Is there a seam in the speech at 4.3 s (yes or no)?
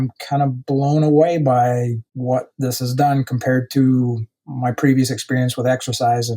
no